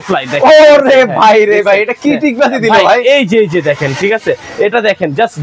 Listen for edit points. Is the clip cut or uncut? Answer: uncut